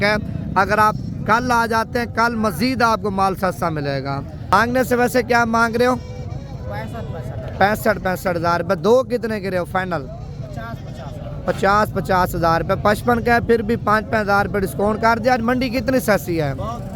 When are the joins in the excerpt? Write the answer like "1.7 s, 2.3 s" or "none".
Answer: 4.4 s